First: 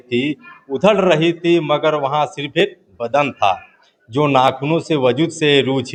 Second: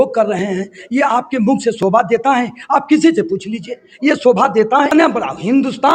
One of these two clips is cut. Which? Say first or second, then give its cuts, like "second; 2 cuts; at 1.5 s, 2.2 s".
second; 1 cut; at 4.9 s